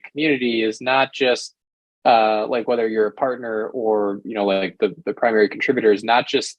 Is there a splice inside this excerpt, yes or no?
no